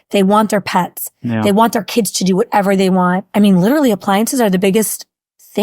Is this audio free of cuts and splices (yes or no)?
no